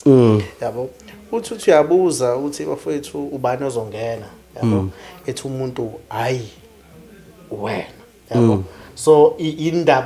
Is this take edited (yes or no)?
no